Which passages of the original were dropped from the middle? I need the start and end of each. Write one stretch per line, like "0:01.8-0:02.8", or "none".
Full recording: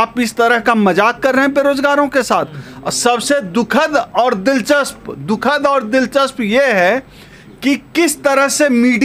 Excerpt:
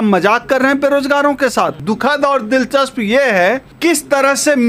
0:02.5-0:05.2
0:07.1-0:07.9

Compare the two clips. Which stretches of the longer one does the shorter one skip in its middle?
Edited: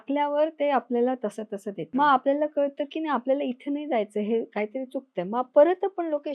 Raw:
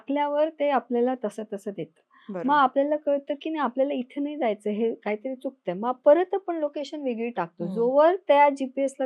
0:01.8-0:02.3

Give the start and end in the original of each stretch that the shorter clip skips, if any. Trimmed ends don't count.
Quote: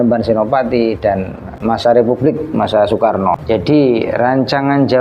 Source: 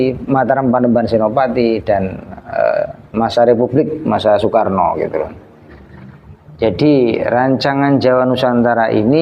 0:02.3-0:03.0
0:04.9-0:06.5

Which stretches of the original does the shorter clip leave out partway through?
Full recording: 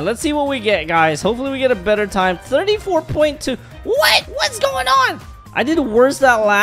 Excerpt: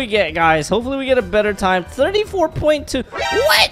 none

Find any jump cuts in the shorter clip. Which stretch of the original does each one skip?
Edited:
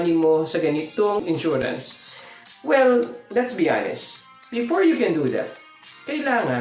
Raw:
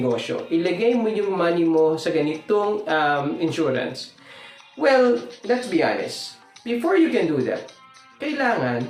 0:02.7-0:03.3

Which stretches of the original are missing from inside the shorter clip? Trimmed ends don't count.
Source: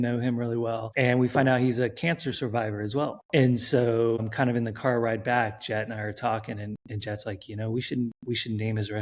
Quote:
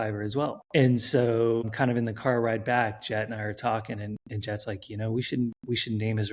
none

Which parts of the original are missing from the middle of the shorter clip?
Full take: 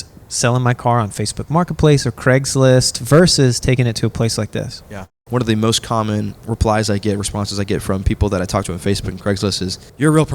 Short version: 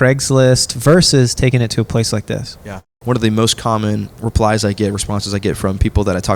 none

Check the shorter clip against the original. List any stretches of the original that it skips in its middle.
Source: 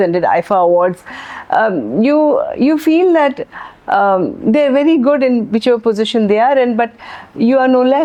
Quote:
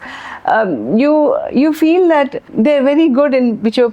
0:03.5-0:04.3

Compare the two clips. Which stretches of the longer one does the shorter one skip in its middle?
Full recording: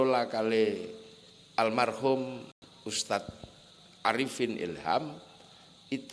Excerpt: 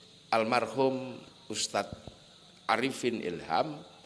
0:02.5-0:02.6

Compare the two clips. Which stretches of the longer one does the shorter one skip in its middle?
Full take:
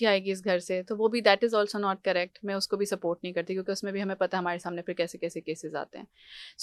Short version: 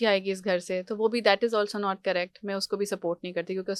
none

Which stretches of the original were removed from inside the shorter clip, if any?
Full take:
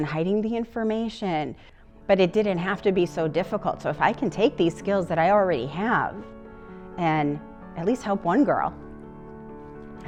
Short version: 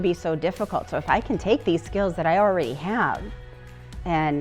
none

